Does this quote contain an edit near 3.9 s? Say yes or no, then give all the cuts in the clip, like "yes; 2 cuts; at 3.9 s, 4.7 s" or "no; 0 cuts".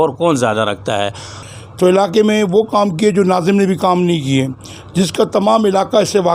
no; 1 cut; at 1.4 s